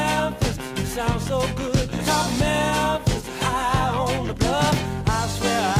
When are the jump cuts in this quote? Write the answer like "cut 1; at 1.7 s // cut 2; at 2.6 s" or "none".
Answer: cut 1; at 4.3 s